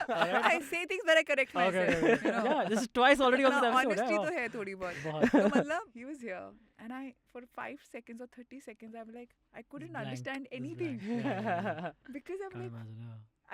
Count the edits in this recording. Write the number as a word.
one